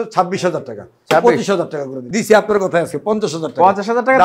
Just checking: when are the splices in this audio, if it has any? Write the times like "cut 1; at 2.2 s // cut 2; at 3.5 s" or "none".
cut 1; at 2.0 s